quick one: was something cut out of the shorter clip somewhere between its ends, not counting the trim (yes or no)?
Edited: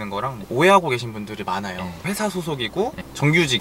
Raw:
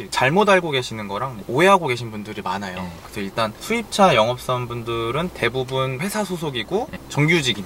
yes